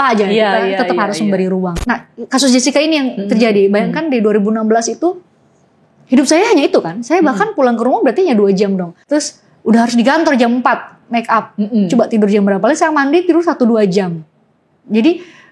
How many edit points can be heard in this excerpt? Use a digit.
2